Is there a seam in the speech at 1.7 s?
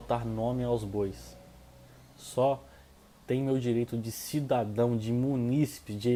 no; 0 cuts

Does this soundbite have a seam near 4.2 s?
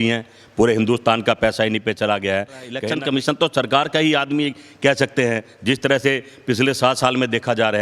no; 1 cut; at 2.8 s

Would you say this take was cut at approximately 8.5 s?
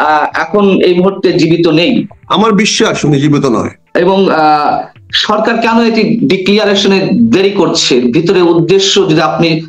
no; 2 cuts; at 2.2 s, 3.8 s

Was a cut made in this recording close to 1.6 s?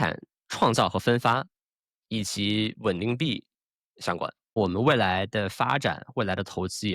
no; 1 cut; at 4.6 s

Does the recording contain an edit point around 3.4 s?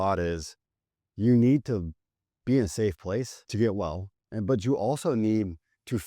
yes; 1 cut; at 3.4 s

